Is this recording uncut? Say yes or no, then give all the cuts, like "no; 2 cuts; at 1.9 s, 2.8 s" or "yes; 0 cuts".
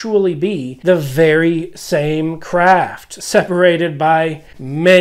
yes; 0 cuts